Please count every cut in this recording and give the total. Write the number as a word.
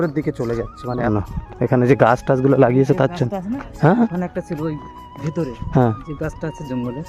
one